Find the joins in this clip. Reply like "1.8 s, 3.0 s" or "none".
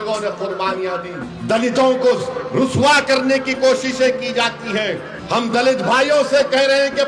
1.3 s, 5.1 s